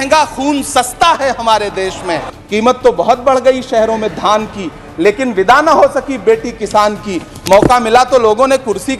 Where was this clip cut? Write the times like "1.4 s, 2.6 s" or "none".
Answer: 2.3 s

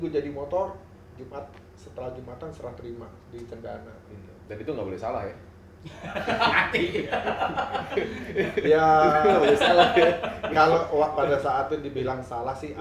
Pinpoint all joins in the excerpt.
none

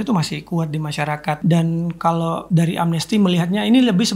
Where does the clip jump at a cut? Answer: 1.4 s, 2.4 s

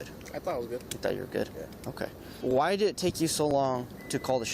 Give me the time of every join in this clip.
2.3 s

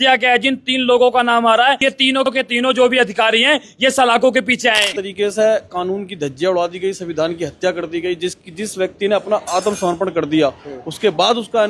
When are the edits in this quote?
2.0 s, 5.0 s

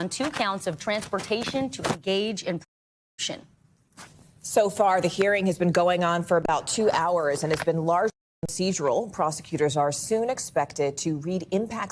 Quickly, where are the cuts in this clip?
none

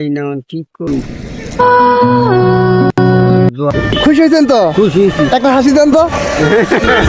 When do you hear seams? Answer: 3.5 s

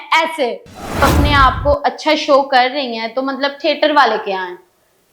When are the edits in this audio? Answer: 1.0 s

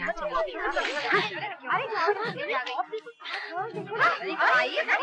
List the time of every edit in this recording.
none

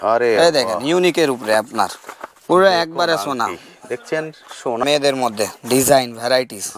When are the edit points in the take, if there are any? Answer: 4.8 s

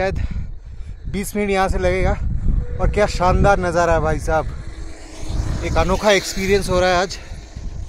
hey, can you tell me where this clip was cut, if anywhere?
none

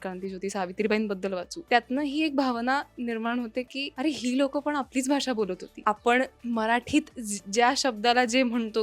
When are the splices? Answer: 1.5 s, 3.8 s, 5.7 s, 6.4 s

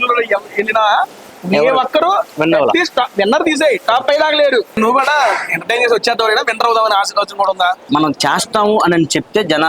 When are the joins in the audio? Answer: 4.7 s, 7.8 s

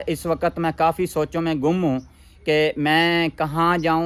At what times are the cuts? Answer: none

